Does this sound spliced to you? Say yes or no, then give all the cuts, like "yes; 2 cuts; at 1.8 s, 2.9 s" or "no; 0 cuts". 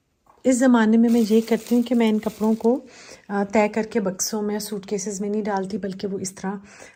no; 0 cuts